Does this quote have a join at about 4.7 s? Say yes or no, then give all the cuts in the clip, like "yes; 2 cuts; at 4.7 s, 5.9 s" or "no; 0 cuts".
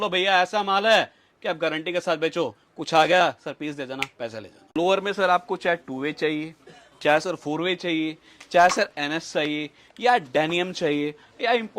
yes; 1 cut; at 4.7 s